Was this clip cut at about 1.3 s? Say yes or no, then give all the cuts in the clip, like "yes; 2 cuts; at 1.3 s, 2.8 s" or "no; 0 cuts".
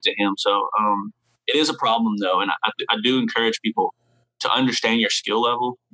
yes; 1 cut; at 1.3 s